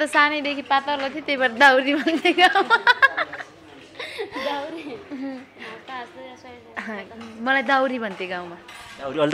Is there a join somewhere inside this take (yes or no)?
no